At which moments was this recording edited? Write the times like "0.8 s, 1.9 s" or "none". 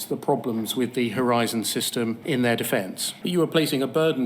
2.2 s, 3.2 s